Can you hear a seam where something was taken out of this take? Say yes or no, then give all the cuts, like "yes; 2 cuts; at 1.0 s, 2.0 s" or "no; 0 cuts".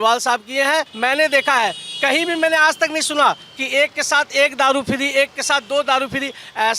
yes; 1 cut; at 0.9 s